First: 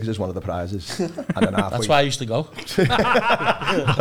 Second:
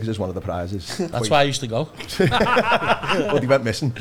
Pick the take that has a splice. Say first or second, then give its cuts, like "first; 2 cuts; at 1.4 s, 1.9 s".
second; 2 cuts; at 1.1 s, 3.3 s